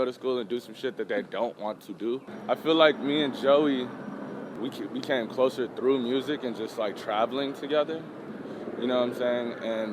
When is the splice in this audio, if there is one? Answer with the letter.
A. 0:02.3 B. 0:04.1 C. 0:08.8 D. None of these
A